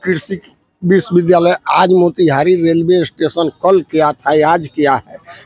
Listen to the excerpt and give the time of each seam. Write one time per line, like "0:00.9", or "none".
none